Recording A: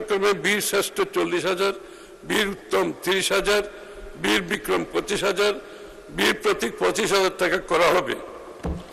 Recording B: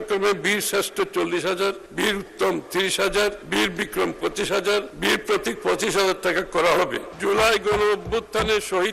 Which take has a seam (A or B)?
B